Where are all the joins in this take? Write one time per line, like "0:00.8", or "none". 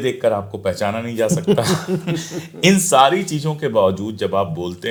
none